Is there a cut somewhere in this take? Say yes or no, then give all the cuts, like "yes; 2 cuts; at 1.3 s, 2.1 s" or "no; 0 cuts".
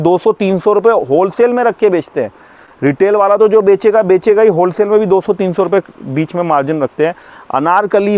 no; 0 cuts